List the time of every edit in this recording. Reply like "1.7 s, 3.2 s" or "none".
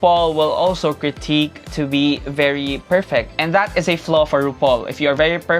none